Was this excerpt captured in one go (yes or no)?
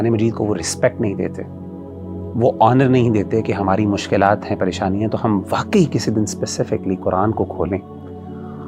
yes